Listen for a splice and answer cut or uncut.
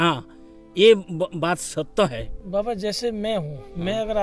cut